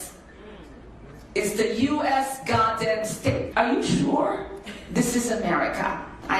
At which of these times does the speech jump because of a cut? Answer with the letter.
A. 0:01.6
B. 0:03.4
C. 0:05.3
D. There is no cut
B